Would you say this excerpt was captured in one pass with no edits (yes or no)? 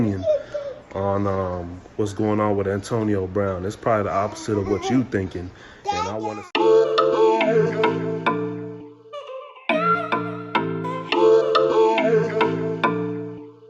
no